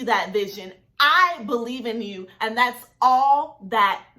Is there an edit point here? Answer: yes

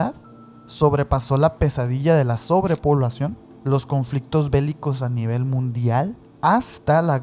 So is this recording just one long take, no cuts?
no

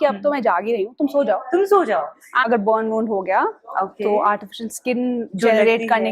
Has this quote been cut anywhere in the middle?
yes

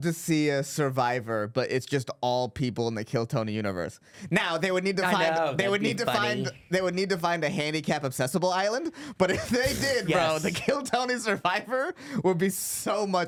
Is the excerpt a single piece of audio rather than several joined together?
yes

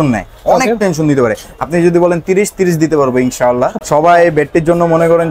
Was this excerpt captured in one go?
no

